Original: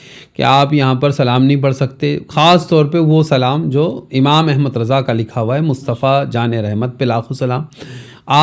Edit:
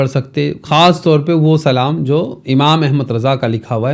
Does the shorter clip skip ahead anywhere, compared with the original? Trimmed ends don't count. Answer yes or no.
no